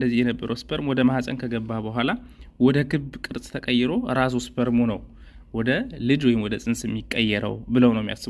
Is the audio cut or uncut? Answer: uncut